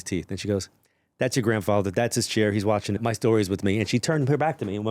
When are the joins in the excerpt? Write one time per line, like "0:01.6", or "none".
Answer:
0:03.0